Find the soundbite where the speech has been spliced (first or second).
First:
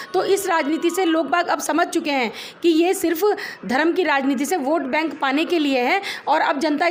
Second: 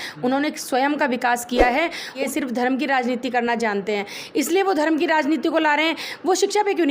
second